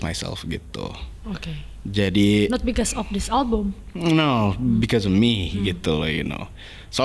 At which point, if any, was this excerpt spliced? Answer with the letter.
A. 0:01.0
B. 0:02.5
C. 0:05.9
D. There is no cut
D